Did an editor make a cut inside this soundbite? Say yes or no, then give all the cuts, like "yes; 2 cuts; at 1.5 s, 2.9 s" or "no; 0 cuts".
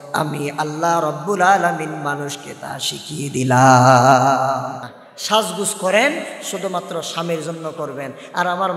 yes; 1 cut; at 4.9 s